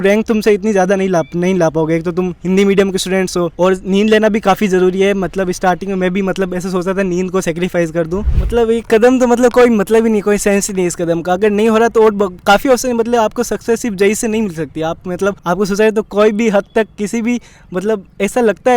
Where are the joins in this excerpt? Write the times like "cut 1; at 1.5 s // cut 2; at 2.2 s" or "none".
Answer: cut 1; at 3.5 s // cut 2; at 8.2 s // cut 3; at 15.4 s